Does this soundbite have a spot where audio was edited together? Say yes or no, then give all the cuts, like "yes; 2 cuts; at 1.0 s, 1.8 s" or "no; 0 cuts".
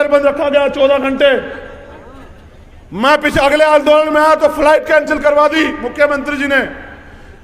no; 0 cuts